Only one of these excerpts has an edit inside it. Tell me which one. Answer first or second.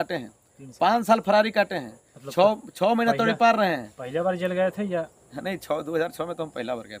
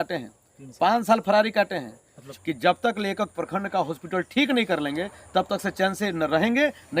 second